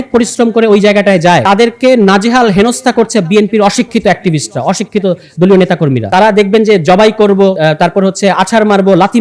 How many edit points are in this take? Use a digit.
3